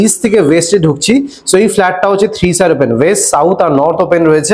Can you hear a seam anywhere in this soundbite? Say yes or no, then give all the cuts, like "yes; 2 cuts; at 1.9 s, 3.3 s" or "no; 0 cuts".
no; 0 cuts